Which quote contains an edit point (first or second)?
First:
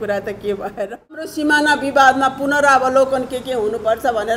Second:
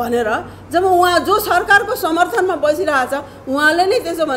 first